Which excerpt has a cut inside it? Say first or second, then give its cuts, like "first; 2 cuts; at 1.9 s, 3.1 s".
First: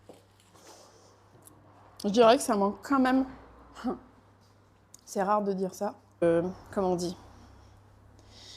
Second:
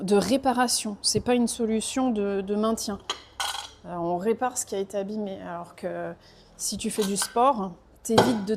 first; 1 cut; at 6.2 s